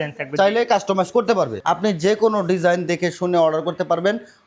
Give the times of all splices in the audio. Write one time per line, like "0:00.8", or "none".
0:01.6

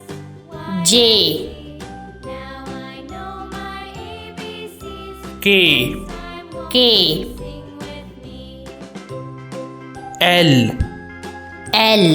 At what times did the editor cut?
0:01.8
0:05.1
0:08.0
0:10.2

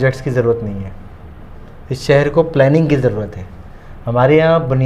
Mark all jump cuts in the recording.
none

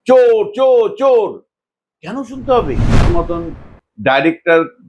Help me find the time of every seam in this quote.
0:03.1

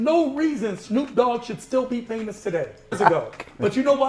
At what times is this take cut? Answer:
0:02.9

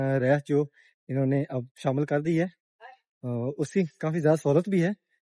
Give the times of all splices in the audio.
none

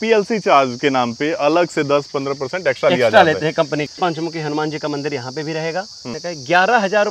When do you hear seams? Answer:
0:03.9
0:06.2

